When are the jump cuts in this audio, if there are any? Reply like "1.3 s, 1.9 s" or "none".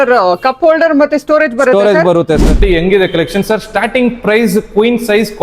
2.6 s